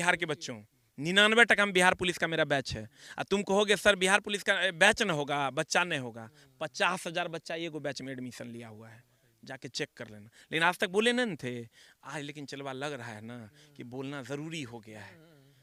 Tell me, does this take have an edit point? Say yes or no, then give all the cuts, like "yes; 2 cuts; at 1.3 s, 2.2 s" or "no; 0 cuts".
no; 0 cuts